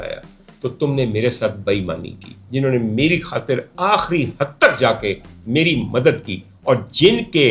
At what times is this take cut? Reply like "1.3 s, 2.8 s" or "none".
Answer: 2.4 s